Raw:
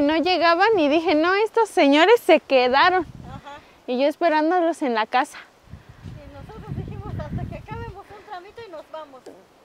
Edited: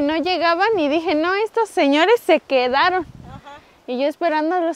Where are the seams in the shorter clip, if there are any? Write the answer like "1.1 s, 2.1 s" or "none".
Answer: none